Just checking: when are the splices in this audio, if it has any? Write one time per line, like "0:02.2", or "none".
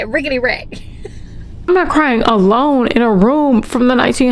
0:01.5

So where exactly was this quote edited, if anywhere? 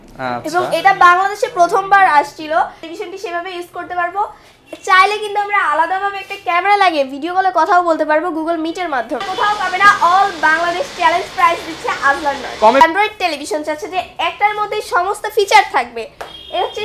0:02.8
0:09.2
0:12.8

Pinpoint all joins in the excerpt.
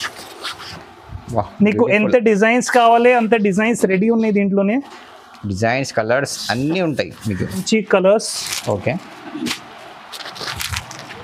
0:07.6

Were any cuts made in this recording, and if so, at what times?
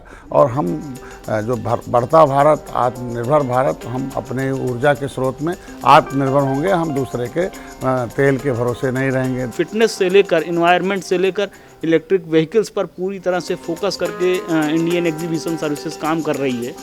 0:09.5

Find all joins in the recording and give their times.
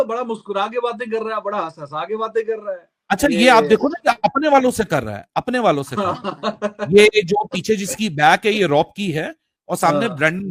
none

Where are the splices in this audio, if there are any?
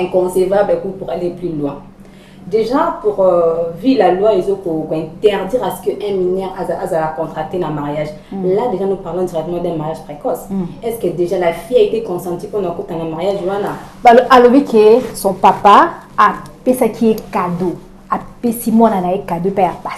none

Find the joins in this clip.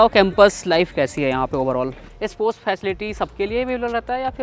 0:02.0

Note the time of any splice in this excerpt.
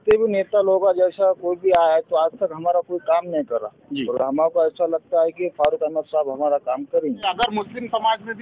0:07.2

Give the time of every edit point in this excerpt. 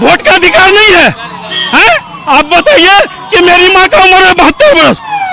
none

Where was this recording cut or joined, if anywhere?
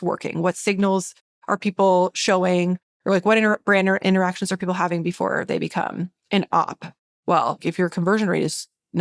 0:06.1
0:07.7

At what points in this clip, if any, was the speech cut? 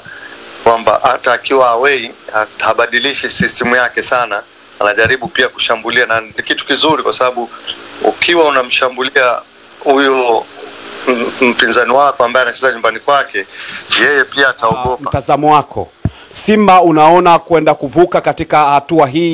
0:15.1

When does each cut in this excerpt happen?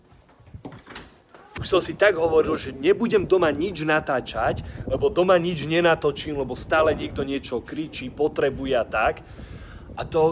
0:01.6

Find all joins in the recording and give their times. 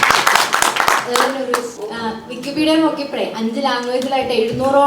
0:01.7

